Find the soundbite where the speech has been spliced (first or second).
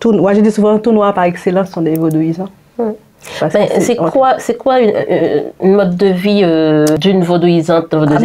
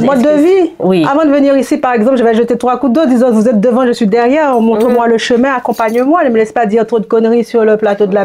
first